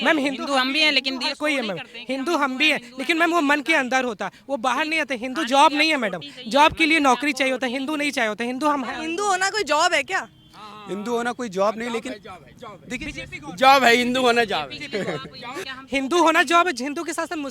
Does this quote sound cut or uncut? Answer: cut